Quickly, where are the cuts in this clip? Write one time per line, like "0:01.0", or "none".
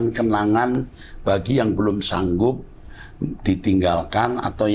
none